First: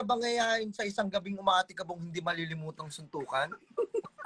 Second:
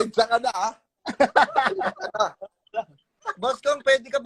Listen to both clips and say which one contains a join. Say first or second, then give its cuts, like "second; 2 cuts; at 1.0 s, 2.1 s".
second; 1 cut; at 3.1 s